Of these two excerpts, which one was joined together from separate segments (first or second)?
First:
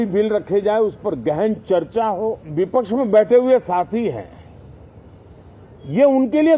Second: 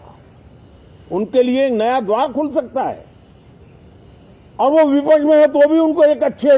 first